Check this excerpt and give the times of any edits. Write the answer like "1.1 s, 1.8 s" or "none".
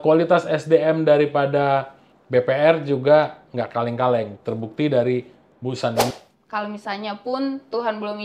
6.1 s